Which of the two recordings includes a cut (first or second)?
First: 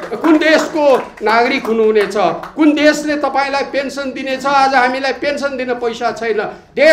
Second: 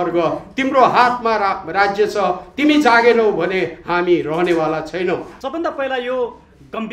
second